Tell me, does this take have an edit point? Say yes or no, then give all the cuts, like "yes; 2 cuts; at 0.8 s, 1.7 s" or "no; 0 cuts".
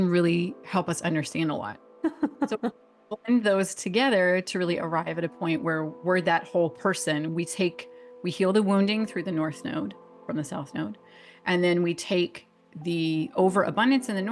yes; 1 cut; at 1.9 s